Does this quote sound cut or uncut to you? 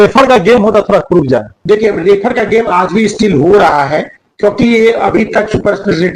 uncut